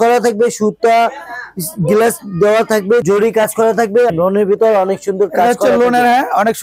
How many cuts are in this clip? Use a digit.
2